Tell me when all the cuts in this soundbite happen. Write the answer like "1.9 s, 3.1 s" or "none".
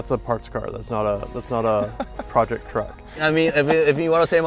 3.2 s